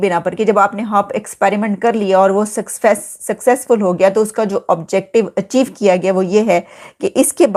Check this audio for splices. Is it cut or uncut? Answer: uncut